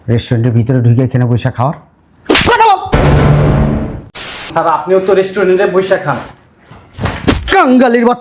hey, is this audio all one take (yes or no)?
no